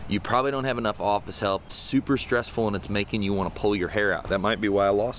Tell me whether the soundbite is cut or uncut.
cut